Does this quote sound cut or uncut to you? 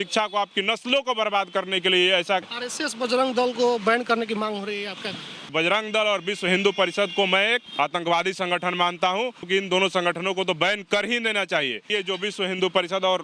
cut